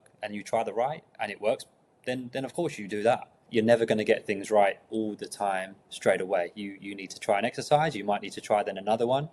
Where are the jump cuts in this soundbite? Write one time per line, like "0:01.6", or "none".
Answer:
0:03.4